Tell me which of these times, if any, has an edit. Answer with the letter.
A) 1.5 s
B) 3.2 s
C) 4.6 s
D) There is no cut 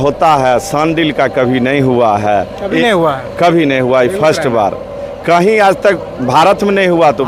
D